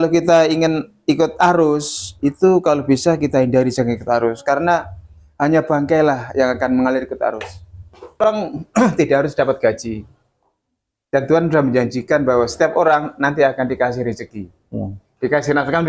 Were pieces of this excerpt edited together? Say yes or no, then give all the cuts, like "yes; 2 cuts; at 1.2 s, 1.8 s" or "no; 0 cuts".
yes; 1 cut; at 8.2 s